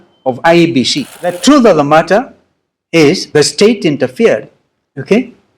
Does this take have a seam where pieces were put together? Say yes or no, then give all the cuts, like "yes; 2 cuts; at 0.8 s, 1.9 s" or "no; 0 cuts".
yes; 1 cut; at 1.0 s